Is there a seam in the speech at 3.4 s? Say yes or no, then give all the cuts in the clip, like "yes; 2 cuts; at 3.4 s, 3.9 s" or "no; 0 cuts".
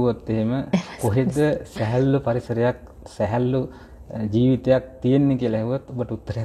no; 0 cuts